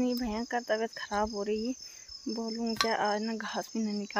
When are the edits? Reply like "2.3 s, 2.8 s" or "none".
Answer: none